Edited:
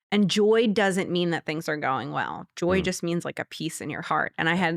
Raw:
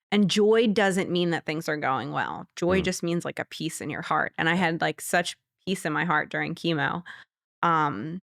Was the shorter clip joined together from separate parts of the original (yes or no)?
no